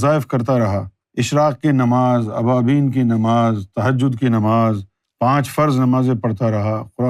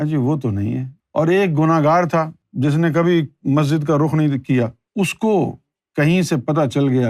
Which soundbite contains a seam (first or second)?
second